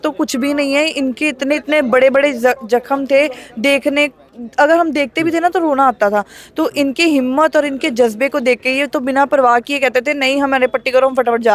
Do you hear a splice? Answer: no; 0 cuts

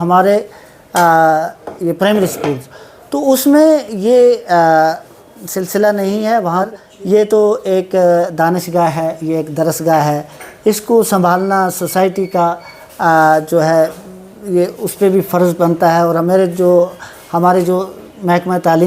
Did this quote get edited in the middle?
yes; 1 cut; at 6.6 s

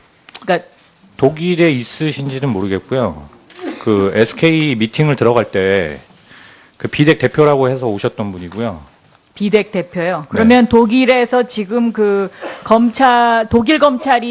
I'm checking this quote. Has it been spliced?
yes; 1 cut; at 4.5 s

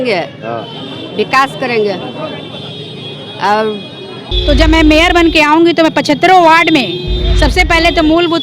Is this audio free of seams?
no; 2 cuts; at 2.5 s, 4.2 s

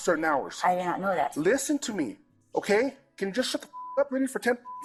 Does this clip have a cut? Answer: no; 0 cuts

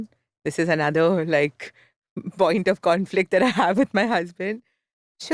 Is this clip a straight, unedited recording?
yes; 0 cuts

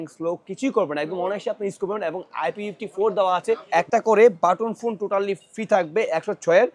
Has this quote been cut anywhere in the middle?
yes; 1 cut; at 3.6 s

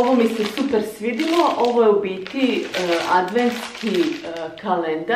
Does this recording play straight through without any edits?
yes; 0 cuts

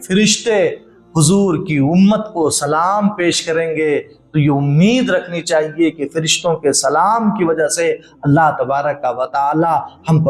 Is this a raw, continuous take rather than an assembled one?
yes; 0 cuts

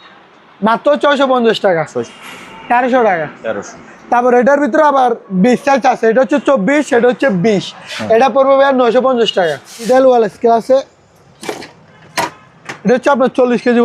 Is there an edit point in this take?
yes; 2 cuts; at 2.2 s, 9.9 s

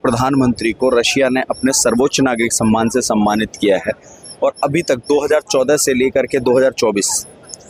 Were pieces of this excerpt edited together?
no; 0 cuts

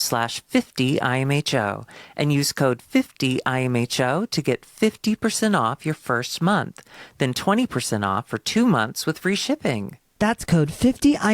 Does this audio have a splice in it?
no; 0 cuts

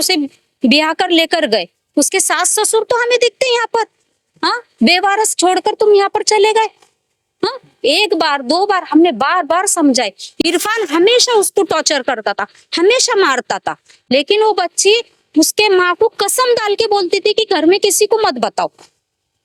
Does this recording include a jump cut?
no; 0 cuts

